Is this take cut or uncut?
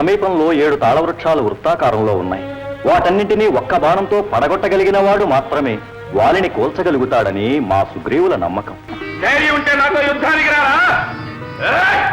cut